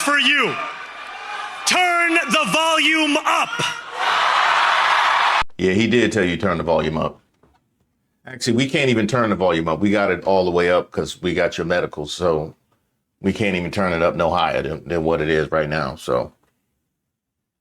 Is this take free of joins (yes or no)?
no